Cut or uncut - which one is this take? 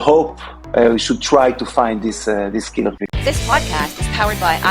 cut